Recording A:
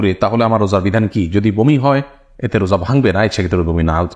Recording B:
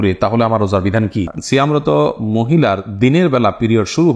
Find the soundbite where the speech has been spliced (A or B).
B